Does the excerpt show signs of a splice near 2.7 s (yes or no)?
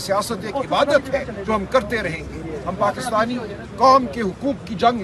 no